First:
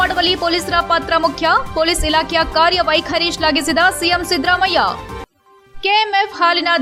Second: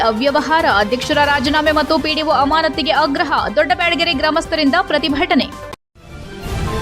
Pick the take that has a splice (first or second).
second